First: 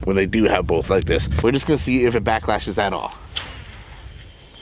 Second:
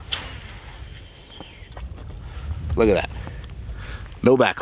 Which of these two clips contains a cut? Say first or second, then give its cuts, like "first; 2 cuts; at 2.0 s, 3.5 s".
first; 1 cut; at 1.3 s